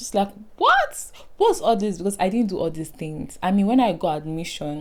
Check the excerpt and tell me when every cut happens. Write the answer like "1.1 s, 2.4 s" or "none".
none